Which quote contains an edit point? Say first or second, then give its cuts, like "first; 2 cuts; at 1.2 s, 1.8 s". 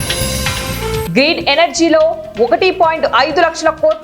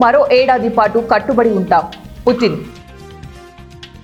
first; 1 cut; at 1.0 s